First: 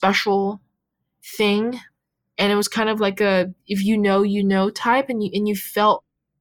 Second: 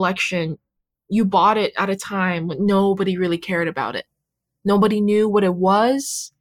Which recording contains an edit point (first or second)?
first